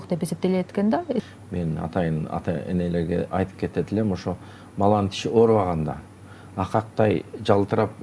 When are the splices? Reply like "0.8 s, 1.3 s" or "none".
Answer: 1.2 s

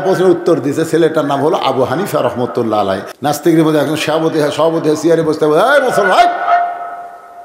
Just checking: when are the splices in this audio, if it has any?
3.1 s

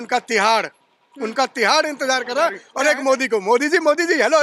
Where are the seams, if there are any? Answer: 2.7 s

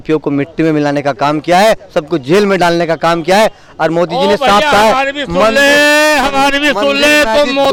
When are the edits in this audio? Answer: none

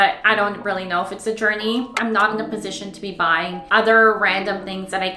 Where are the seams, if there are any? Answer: 1.9 s

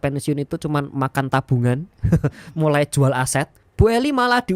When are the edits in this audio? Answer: 3.6 s

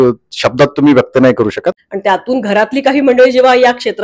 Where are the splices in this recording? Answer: 1.9 s

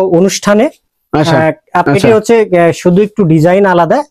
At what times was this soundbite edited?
1.8 s

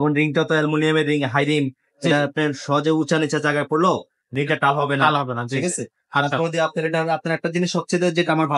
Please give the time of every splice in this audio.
none

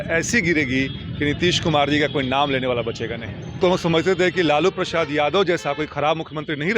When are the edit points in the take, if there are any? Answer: 3.6 s

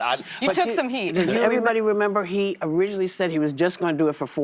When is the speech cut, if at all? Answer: 1.3 s

